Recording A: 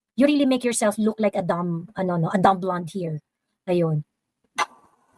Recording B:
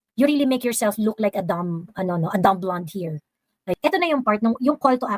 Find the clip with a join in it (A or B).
B